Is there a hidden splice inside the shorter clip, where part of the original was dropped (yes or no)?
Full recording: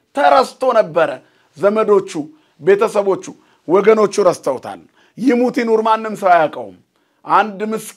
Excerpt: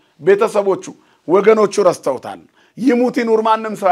no